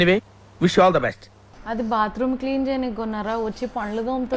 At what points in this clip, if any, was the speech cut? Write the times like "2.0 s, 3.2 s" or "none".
1.4 s